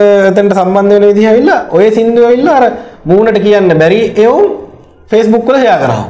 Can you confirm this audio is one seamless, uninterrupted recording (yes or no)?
yes